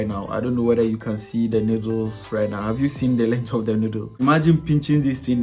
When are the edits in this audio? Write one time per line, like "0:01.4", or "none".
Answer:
0:04.1